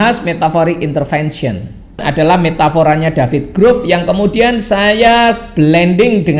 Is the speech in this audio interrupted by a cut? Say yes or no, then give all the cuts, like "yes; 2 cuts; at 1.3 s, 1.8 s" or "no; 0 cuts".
yes; 1 cut; at 2.1 s